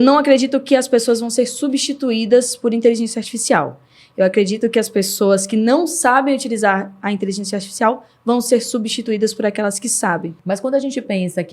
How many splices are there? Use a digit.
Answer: 1